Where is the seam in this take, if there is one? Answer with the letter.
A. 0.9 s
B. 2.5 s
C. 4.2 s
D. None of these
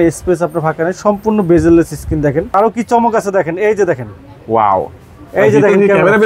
B